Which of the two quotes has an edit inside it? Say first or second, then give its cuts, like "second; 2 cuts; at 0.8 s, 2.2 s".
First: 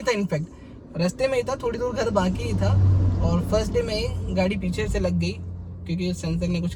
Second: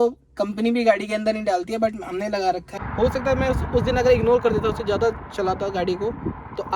second; 1 cut; at 2.7 s